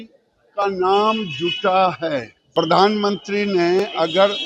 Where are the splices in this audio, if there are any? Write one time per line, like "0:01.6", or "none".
0:02.4